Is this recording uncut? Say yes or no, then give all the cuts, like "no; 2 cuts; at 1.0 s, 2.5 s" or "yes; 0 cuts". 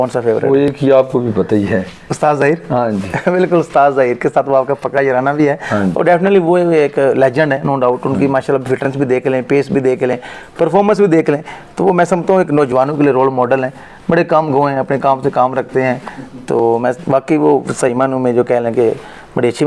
yes; 0 cuts